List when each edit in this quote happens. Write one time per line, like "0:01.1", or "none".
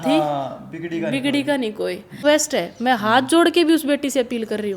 0:02.2